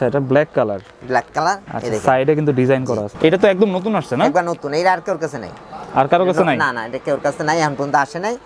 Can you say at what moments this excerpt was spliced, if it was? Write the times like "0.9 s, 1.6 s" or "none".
3.1 s